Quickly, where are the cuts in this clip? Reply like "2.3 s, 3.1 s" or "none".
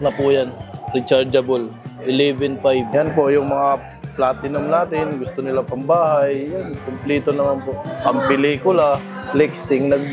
2.9 s, 8.0 s, 9.1 s